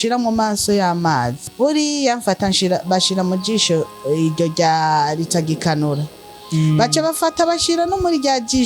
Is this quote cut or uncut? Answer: cut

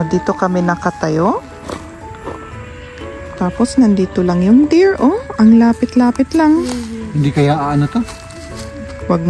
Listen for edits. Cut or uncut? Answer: uncut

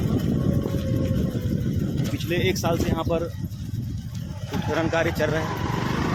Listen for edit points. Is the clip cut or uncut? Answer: uncut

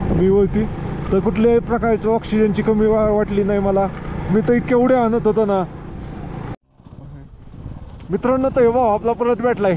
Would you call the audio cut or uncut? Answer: cut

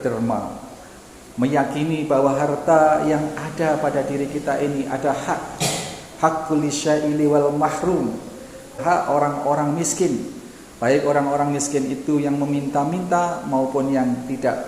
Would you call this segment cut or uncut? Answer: cut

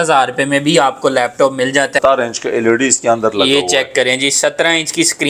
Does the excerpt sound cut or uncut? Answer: cut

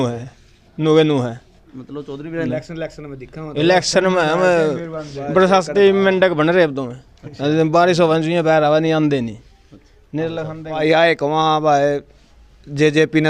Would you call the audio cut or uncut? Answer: cut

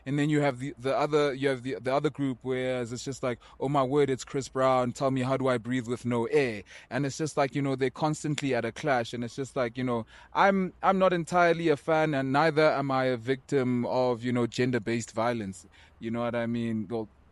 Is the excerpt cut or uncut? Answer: uncut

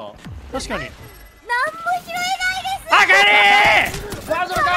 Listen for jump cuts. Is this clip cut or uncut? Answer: uncut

